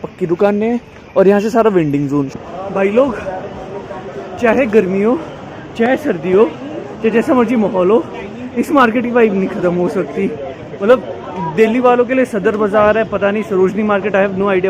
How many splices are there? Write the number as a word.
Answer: one